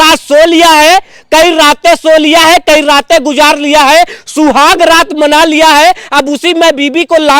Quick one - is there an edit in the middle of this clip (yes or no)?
no